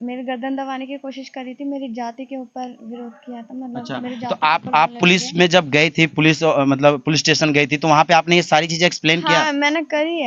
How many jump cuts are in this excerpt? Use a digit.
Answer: 0